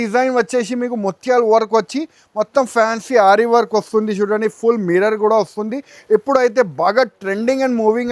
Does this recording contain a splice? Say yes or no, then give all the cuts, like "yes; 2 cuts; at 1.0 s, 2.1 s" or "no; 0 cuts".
no; 0 cuts